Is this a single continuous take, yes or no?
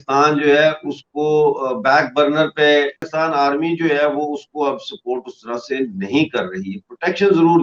no